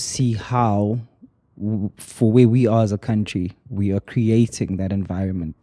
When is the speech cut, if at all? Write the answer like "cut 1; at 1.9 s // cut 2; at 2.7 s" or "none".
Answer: none